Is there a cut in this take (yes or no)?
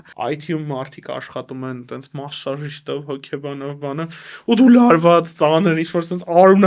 no